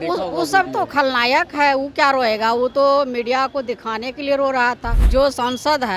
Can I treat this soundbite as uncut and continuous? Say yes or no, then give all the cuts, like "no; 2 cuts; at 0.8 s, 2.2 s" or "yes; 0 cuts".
no; 1 cut; at 5.0 s